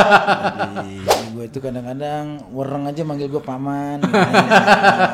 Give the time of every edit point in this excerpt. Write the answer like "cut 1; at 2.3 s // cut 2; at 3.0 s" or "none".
cut 1; at 1.1 s